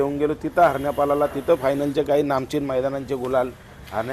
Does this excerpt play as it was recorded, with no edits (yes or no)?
yes